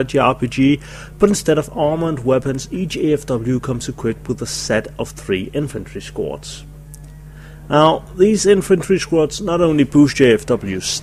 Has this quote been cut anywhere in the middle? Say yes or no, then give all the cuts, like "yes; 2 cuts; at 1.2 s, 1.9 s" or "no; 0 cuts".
yes; 1 cut; at 7.6 s